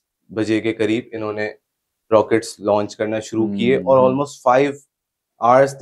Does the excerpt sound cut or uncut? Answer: uncut